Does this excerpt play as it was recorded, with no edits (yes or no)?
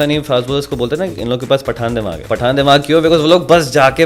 no